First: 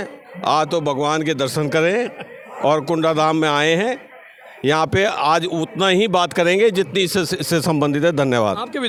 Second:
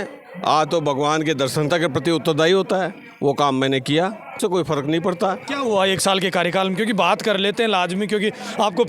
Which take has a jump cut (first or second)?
second